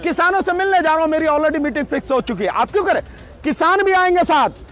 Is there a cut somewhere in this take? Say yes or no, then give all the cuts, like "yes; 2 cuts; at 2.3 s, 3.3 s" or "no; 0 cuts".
no; 0 cuts